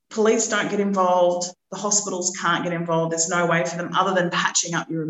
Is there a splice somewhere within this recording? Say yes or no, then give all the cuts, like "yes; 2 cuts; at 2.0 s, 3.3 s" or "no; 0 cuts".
no; 0 cuts